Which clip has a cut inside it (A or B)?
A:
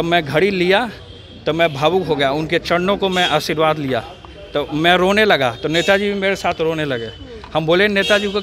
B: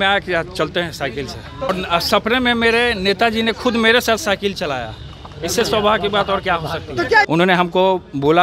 B